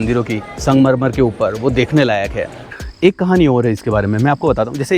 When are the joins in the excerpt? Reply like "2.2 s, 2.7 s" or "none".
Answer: 2.7 s

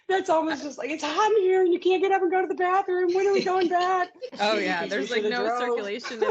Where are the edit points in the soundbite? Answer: 4.2 s

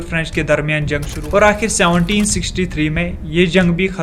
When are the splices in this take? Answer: 1.1 s

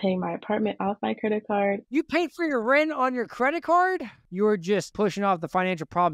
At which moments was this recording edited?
1.9 s, 4.5 s

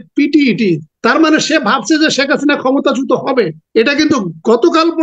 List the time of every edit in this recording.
0.9 s, 3.6 s

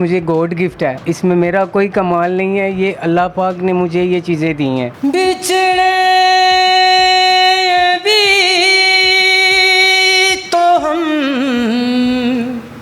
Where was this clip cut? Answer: 1.0 s, 4.9 s

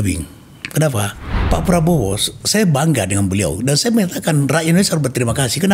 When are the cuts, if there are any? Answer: 1.3 s

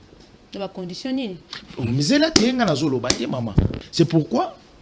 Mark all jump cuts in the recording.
3.8 s

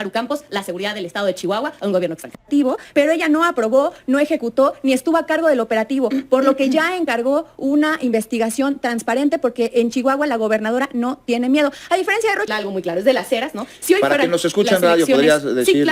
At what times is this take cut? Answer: 2.4 s, 12.5 s

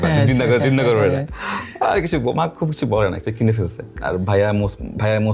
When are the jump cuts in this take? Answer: none

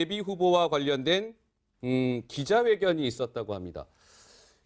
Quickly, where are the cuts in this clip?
none

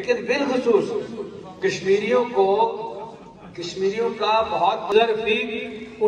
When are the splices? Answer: 4.9 s

